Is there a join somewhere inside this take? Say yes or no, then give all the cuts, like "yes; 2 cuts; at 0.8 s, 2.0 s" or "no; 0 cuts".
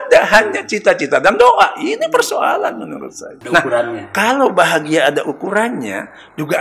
yes; 1 cut; at 3.3 s